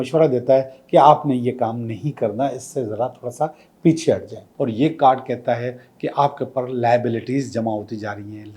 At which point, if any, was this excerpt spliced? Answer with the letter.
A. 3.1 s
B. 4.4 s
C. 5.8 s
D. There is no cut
B